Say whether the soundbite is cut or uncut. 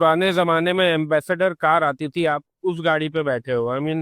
uncut